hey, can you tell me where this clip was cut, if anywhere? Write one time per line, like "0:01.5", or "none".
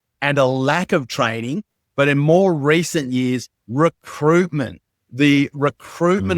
0:01.8